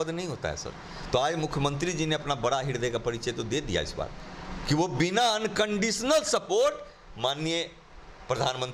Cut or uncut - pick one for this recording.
uncut